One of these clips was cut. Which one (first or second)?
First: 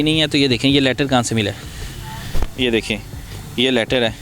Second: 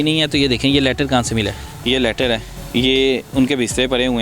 second